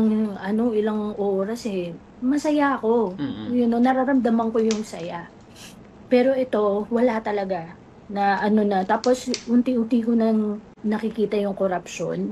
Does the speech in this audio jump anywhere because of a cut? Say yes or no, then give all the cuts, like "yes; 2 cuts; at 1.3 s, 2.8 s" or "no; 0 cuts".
yes; 1 cut; at 10.7 s